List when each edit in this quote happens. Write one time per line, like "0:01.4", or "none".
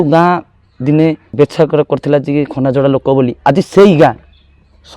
0:01.2